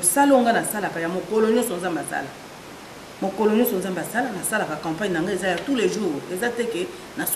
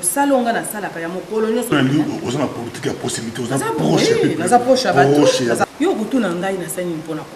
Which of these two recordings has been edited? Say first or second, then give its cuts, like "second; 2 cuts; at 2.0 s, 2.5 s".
second; 2 cuts; at 1.7 s, 5.6 s